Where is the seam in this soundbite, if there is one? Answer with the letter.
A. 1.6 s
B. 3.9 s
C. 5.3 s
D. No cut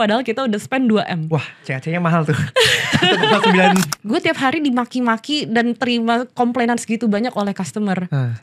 B